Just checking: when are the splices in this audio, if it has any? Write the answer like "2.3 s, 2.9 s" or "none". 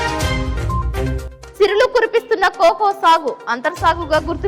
1.2 s